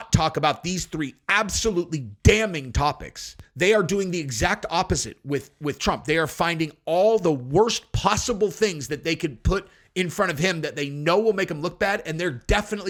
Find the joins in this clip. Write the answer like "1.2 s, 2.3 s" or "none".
none